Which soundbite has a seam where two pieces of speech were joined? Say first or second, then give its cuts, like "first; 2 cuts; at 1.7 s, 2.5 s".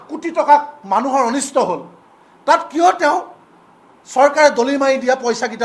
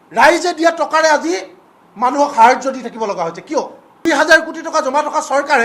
second; 1 cut; at 4.1 s